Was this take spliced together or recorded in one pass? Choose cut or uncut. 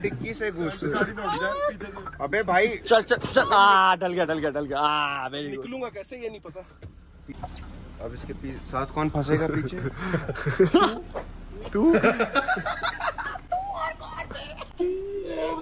uncut